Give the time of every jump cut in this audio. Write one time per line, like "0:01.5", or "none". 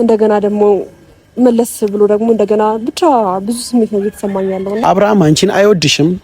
0:04.8

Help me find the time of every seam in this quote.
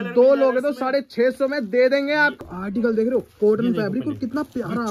0:02.4

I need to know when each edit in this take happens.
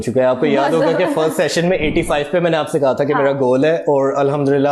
none

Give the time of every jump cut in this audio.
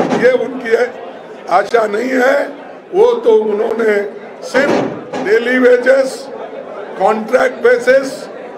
0:05.0

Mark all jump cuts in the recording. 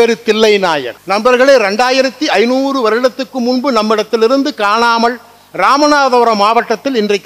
0:00.9

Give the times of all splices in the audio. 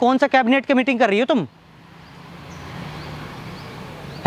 none

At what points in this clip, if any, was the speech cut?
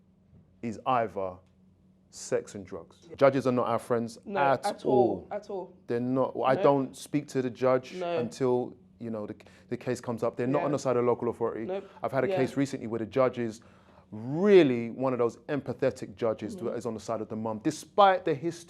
0:02.9

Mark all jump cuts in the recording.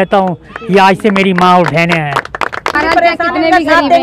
0:02.8

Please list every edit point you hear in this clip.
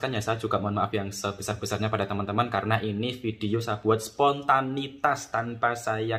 none

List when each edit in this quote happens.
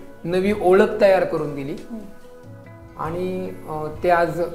none

